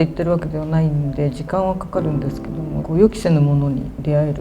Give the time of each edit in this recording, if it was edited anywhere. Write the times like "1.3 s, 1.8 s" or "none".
2.8 s